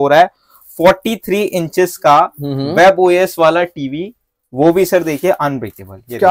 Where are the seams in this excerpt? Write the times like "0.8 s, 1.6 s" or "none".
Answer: none